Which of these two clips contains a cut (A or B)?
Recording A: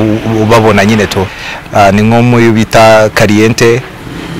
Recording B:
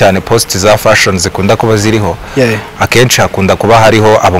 A